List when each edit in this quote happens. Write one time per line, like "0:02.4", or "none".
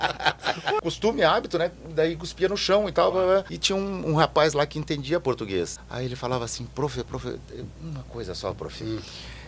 0:00.8
0:03.6
0:05.8

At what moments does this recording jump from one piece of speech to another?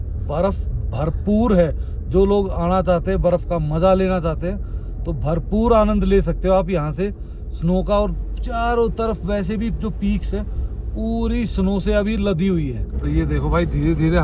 0:12.9

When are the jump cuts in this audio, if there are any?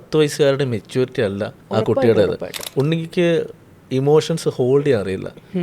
0:01.6
0:02.6

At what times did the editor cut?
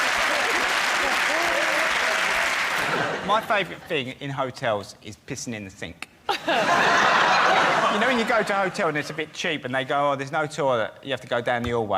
0:02.9

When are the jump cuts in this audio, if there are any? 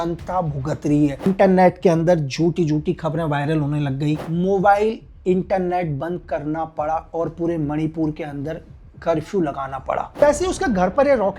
0:01.2
0:04.2
0:10.1

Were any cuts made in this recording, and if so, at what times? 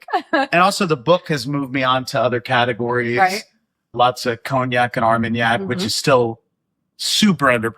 0:03.9

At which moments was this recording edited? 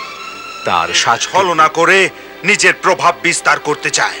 0:01.2

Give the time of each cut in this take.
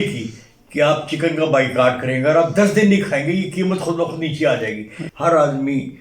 0:05.0

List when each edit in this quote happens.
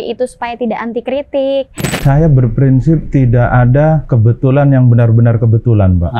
0:02.0
0:03.0
0:04.1

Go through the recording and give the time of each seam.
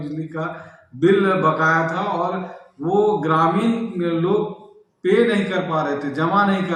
none

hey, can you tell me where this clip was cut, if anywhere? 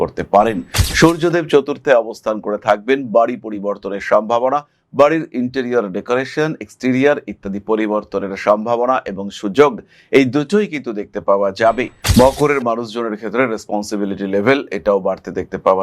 0:12.0

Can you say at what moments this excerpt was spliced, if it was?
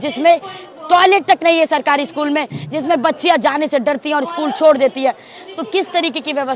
none

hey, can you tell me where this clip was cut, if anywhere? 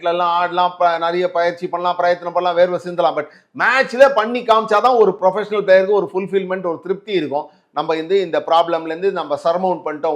none

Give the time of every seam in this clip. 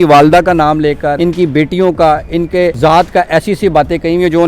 0:01.2
0:02.8

